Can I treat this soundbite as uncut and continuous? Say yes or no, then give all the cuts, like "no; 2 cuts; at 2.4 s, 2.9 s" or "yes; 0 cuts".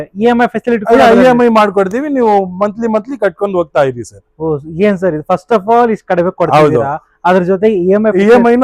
yes; 0 cuts